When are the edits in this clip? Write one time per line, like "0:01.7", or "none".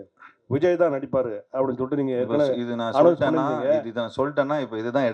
none